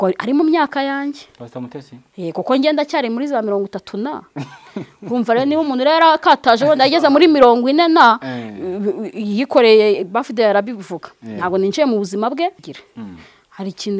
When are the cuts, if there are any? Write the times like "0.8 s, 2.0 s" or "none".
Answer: 12.6 s